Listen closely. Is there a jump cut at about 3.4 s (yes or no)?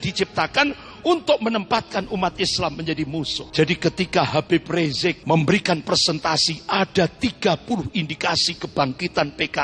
yes